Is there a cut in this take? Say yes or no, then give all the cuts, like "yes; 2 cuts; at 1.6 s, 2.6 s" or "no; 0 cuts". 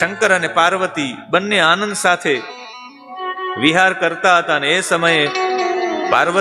no; 0 cuts